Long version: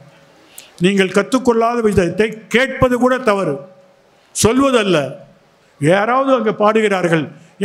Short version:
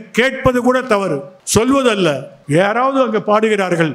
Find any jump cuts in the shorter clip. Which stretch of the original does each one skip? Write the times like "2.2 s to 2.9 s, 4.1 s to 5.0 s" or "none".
3.7 s to 4.2 s, 5.2 s to 5.6 s